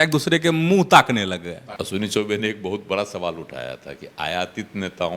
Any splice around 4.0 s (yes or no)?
no